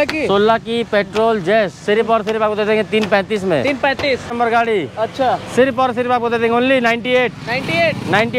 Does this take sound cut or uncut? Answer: cut